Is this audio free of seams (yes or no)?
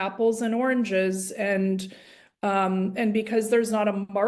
yes